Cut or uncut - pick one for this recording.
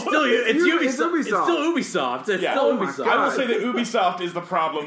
uncut